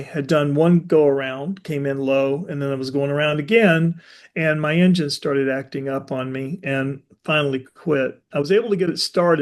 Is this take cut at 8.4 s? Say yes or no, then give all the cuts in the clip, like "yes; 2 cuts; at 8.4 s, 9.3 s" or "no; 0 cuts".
no; 0 cuts